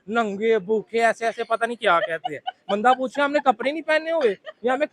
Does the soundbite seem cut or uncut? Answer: uncut